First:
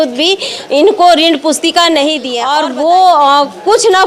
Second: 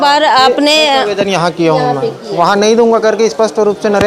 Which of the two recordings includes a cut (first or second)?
first